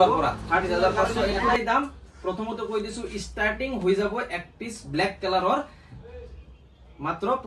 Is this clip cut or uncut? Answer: cut